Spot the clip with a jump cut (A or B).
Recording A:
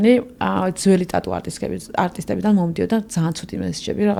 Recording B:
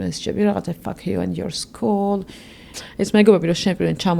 B